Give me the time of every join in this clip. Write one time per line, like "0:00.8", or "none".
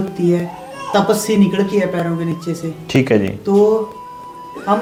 none